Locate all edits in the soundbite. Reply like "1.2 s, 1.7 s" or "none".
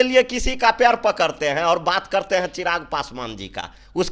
none